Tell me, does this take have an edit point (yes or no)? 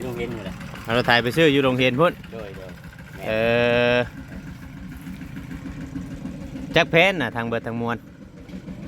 no